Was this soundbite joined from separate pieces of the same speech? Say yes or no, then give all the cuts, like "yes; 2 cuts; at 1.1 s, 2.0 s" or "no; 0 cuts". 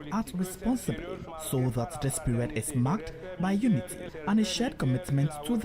yes; 2 cuts; at 1.3 s, 4.1 s